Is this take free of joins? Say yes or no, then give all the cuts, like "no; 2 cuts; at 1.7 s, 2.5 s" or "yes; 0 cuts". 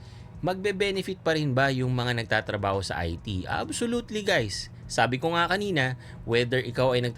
yes; 0 cuts